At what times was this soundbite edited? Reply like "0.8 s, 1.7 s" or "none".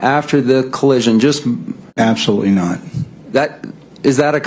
1.9 s